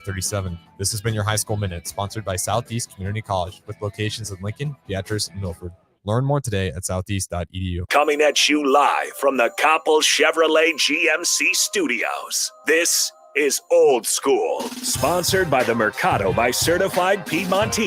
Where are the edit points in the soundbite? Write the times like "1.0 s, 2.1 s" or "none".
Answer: 7.7 s